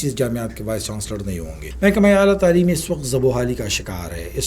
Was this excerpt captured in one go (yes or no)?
no